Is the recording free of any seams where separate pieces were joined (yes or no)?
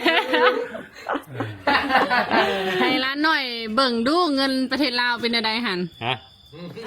no